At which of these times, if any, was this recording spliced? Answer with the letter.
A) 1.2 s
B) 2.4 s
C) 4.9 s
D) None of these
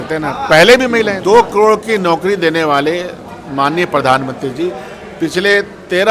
A